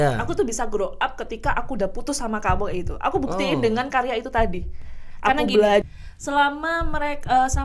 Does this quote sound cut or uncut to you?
cut